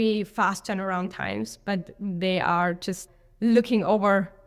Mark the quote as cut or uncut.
uncut